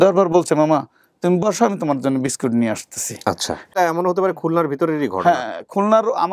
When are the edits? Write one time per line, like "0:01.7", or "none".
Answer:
0:03.7